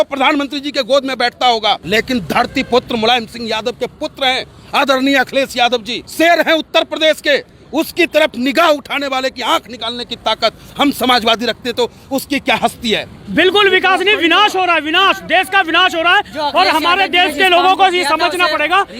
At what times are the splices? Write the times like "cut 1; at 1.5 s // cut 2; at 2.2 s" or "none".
cut 1; at 1.8 s // cut 2; at 6.0 s // cut 3; at 13.2 s